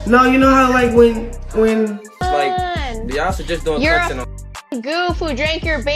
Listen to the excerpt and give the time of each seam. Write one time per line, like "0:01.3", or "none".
0:02.1

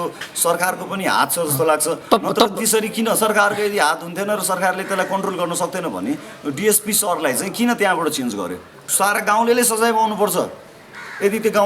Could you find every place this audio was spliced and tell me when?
0:08.8

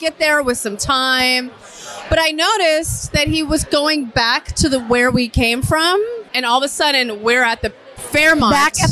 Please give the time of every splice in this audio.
0:06.3

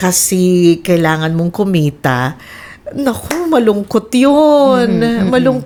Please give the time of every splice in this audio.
none

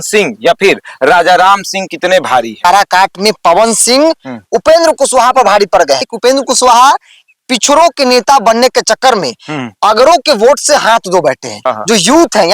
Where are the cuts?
0:02.6
0:06.1
0:11.5

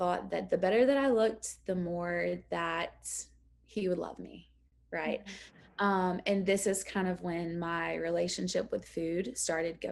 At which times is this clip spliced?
none

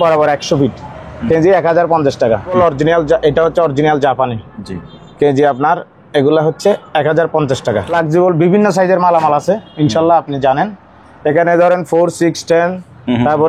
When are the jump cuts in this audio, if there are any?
0:02.5
0:07.9

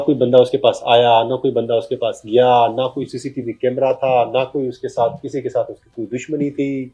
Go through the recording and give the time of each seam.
none

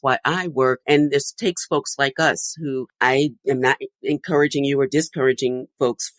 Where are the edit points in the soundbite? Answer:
0:03.4

